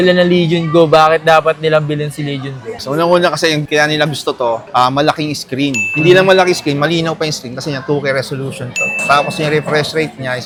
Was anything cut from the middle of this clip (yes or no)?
no